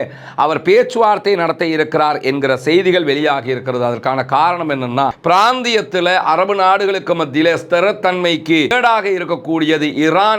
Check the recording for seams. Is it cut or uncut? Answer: cut